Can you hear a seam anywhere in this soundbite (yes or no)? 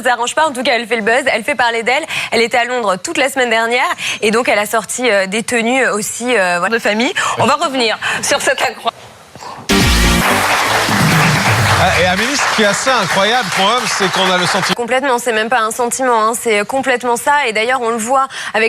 no